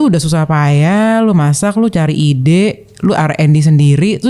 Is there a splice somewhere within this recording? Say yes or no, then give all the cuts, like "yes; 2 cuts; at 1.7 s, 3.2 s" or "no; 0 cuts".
no; 0 cuts